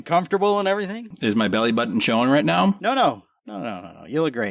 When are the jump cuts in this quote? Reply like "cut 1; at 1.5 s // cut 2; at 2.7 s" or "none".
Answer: cut 1; at 1.1 s // cut 2; at 2.8 s